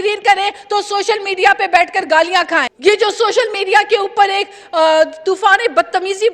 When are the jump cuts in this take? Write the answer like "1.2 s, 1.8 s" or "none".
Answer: 2.7 s